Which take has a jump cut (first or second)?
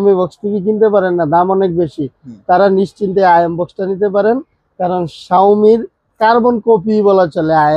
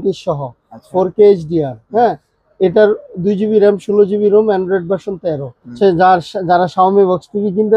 second